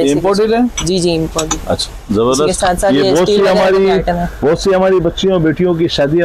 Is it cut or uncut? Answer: uncut